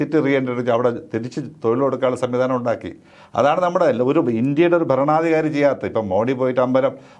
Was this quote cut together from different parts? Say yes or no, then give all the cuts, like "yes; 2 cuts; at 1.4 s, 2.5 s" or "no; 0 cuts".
no; 0 cuts